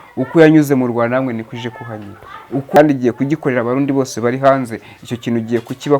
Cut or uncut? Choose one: cut